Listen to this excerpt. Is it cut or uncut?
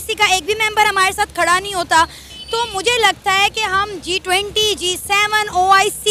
uncut